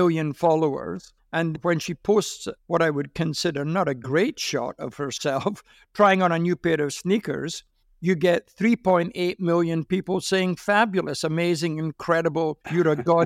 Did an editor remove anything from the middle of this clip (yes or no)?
no